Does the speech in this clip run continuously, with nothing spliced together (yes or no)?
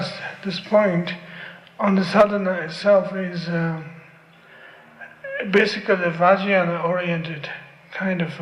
yes